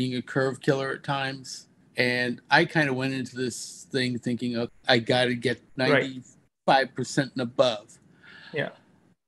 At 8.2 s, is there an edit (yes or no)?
no